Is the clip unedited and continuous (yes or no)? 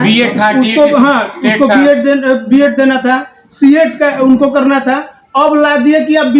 yes